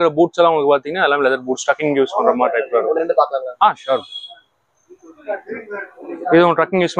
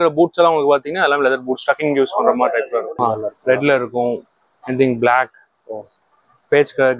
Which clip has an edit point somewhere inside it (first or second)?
second